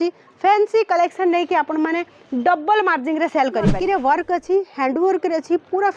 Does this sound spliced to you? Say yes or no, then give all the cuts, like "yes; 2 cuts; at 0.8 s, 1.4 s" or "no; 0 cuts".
yes; 1 cut; at 3.7 s